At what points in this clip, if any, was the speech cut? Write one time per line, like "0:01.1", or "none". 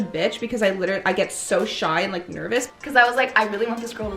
0:02.7

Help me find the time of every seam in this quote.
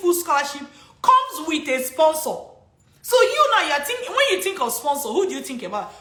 none

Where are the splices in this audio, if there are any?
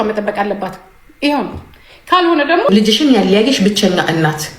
0:02.7

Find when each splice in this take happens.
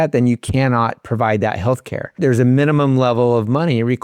0:02.2

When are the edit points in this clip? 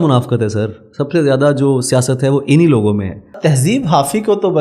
0:03.4

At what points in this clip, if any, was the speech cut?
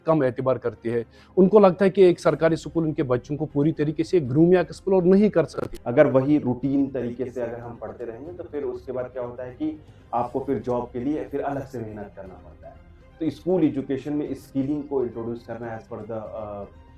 0:05.6

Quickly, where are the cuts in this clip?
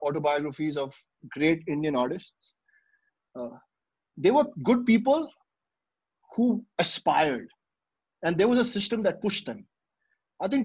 none

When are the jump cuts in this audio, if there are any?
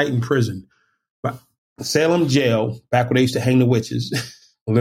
none

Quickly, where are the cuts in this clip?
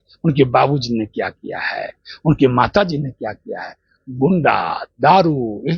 none

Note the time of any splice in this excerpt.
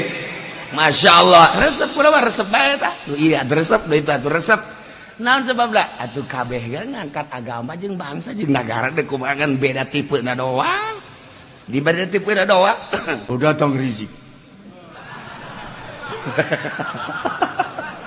0:13.2

